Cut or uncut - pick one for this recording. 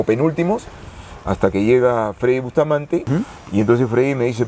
cut